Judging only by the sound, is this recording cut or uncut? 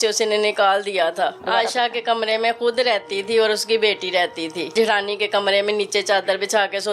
cut